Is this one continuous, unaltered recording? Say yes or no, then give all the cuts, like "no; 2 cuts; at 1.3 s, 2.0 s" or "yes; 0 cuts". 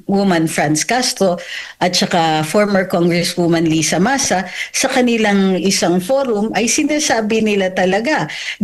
yes; 0 cuts